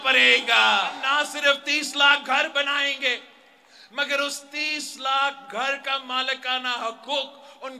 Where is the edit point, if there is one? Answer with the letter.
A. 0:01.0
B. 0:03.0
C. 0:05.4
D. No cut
A